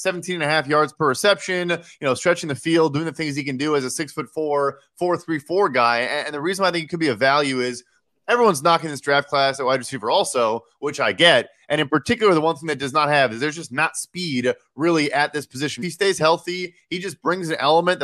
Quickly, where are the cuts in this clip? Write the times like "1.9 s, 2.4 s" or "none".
15.8 s